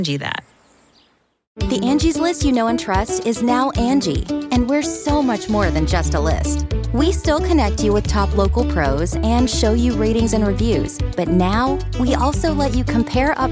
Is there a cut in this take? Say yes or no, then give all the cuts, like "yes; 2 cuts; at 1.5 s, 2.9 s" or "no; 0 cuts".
yes; 1 cut; at 1.3 s